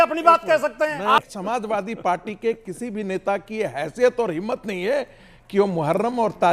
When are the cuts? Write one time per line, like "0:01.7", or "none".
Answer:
0:01.2